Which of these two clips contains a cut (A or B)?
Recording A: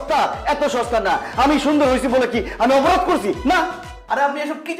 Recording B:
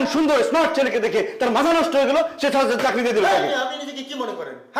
A